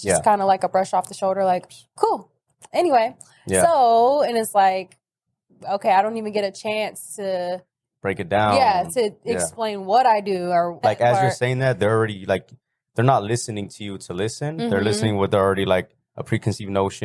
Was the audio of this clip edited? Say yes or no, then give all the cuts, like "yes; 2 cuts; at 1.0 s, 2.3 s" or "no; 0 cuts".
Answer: yes; 1 cut; at 10.7 s